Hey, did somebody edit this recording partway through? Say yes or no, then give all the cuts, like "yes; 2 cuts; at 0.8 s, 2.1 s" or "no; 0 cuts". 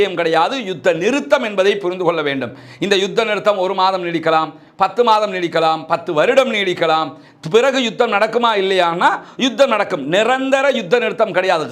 no; 0 cuts